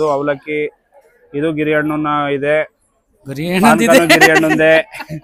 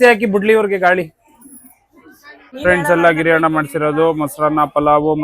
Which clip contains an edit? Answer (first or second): second